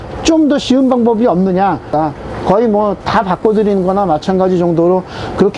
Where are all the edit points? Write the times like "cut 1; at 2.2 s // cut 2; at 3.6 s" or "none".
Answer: cut 1; at 1.9 s

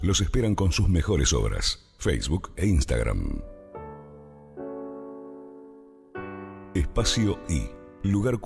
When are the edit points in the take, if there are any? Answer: cut 1; at 3.4 s // cut 2; at 4.8 s // cut 3; at 6.6 s

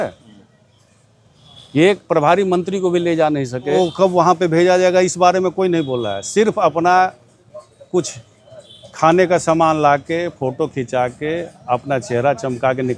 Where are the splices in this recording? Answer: cut 1; at 3.8 s

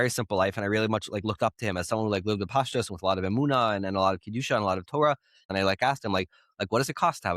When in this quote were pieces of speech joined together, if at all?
cut 1; at 5.5 s

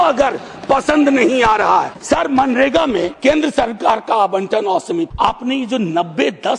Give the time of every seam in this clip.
cut 1; at 2.0 s // cut 2; at 3.1 s // cut 3; at 5.1 s

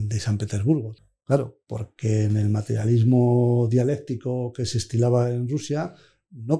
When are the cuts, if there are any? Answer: cut 1; at 1.0 s

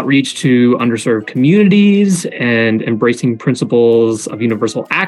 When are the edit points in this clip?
none

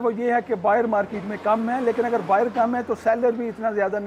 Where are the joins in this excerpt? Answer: none

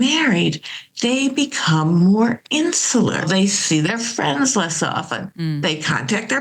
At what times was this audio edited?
cut 1; at 3.2 s

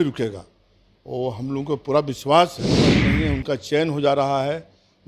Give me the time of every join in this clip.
cut 1; at 3.0 s

